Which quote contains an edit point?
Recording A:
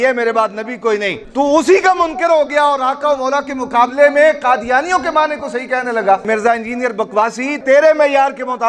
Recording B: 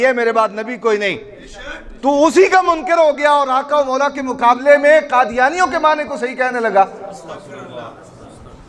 A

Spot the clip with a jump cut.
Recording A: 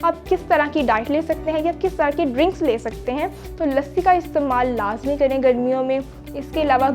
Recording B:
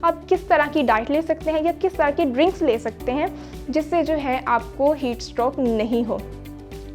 A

